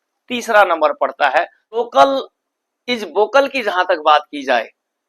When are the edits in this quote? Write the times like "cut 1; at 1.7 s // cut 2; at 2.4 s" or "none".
cut 1; at 1.6 s